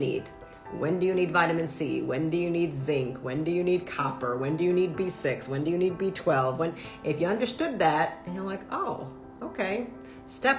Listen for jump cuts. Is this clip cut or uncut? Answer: uncut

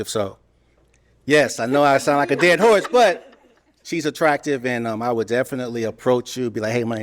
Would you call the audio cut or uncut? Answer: uncut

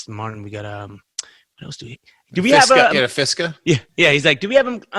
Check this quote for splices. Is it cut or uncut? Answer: uncut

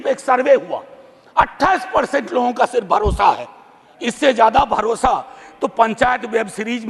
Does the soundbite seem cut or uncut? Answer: uncut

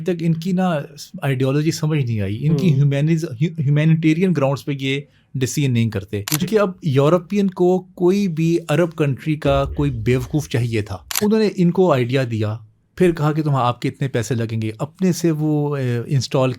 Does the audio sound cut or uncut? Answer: cut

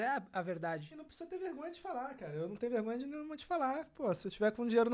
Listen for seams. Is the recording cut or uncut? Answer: uncut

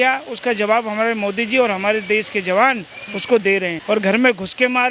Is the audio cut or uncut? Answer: cut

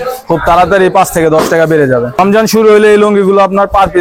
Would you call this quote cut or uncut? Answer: cut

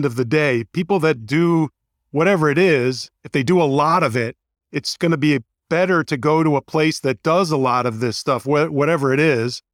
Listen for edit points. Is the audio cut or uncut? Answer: uncut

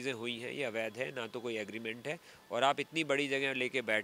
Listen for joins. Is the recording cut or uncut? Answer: uncut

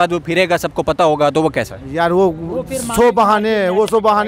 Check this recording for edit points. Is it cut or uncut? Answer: uncut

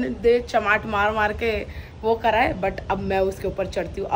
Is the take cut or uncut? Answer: uncut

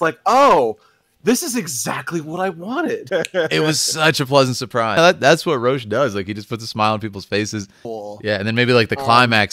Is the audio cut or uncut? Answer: cut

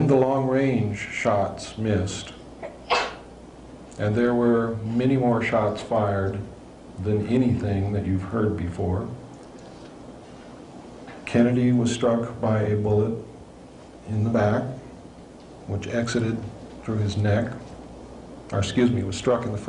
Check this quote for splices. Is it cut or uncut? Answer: uncut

